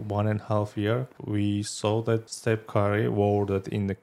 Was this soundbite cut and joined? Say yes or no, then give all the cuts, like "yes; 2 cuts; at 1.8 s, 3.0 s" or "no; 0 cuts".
yes; 2 cuts; at 1.1 s, 2.3 s